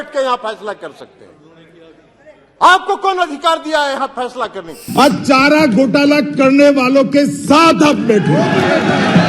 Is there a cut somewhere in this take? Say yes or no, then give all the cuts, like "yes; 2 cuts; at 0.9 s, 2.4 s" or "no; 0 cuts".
yes; 1 cut; at 4.7 s